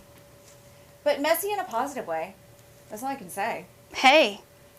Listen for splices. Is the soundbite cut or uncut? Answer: uncut